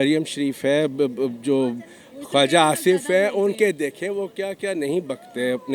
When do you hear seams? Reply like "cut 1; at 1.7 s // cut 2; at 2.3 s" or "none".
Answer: none

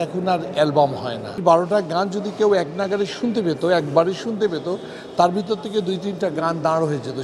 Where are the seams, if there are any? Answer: cut 1; at 1.4 s

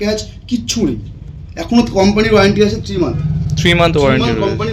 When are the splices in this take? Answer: none

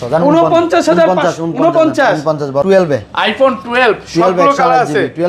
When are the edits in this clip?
cut 1; at 2.6 s

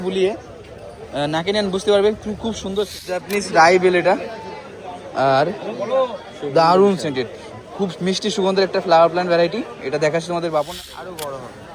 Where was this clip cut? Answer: cut 1; at 3.3 s // cut 2; at 10.8 s

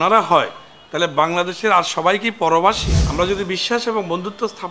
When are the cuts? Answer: cut 1; at 2.9 s

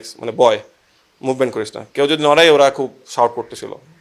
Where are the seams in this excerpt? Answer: none

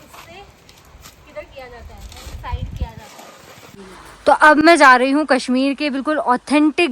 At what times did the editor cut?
none

